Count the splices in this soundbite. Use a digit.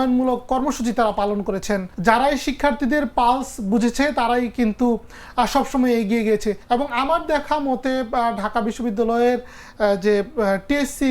2